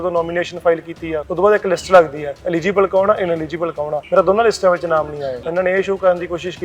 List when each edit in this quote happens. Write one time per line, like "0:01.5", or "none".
0:01.2
0:04.0
0:05.4